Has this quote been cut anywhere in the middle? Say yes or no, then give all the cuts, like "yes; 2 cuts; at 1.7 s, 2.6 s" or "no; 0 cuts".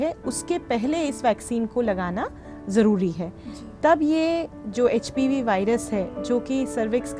no; 0 cuts